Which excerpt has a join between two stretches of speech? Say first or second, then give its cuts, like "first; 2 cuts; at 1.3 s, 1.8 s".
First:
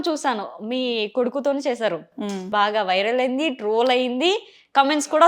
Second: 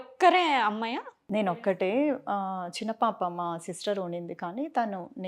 first; 1 cut; at 2.5 s